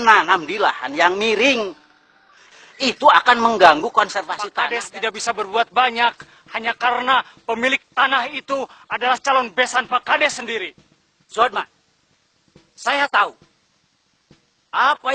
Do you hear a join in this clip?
yes; 1 cut; at 4.4 s

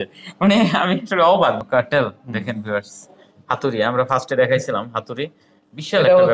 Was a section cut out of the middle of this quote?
yes; 1 cut; at 1.6 s

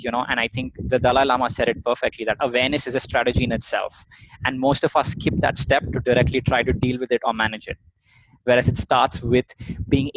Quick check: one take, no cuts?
yes; 0 cuts

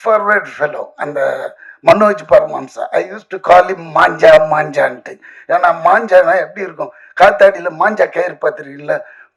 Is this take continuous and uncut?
yes; 0 cuts

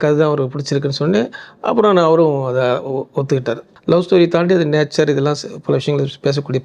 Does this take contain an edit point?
yes; 1 cut; at 3.7 s

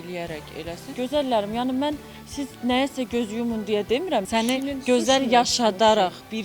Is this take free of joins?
no; 2 cuts; at 0.9 s, 4.2 s

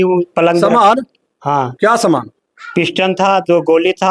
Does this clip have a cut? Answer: no; 0 cuts

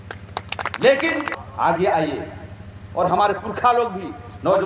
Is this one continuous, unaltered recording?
no; 1 cut; at 1.4 s

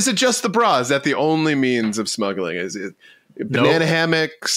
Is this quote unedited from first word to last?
yes; 0 cuts

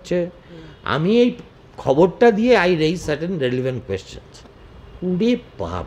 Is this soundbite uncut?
yes; 0 cuts

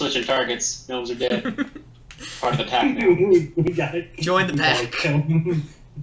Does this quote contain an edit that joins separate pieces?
no; 0 cuts

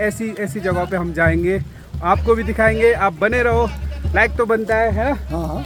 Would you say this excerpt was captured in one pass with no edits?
yes; 0 cuts

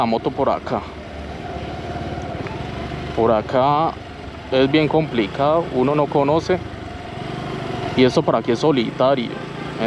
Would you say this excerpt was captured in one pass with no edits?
yes; 0 cuts

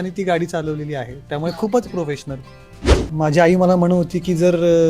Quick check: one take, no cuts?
no; 1 cut; at 3.0 s

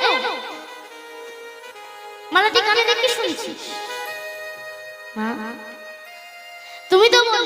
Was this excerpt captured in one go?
yes; 0 cuts

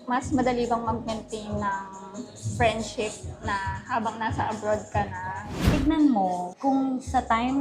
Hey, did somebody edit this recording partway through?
yes; 2 cuts; at 5.6 s, 6.5 s

